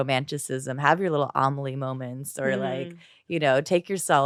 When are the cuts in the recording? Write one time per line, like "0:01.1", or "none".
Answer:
none